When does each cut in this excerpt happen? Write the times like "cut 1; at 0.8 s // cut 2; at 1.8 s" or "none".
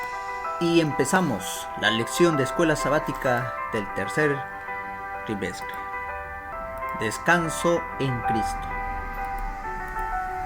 cut 1; at 6.5 s